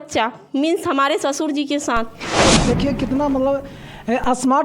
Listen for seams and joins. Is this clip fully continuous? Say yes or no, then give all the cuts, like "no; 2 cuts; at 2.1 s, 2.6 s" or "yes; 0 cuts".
no; 1 cut; at 2.6 s